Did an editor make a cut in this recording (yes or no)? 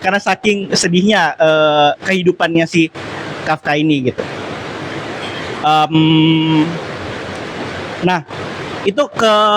no